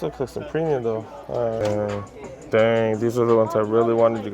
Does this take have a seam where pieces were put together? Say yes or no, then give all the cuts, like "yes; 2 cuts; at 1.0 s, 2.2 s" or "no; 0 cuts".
yes; 1 cut; at 1.6 s